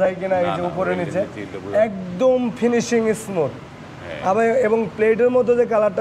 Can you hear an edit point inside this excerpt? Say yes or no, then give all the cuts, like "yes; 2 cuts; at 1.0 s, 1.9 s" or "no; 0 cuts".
no; 0 cuts